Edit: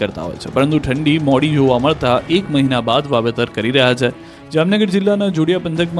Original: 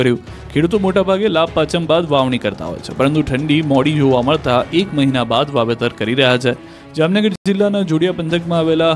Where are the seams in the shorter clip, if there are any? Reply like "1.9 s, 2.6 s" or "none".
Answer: 4.9 s